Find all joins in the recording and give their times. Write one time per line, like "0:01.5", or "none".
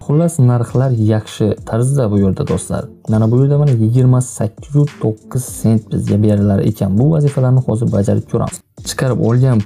0:08.6